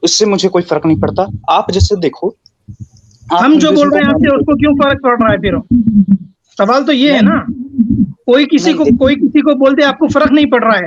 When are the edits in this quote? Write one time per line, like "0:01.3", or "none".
none